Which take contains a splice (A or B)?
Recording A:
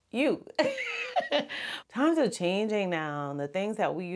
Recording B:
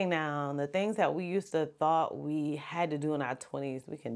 A